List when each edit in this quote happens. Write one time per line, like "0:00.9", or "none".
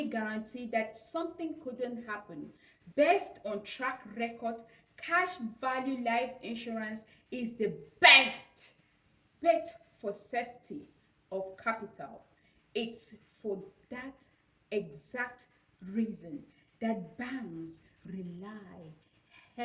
none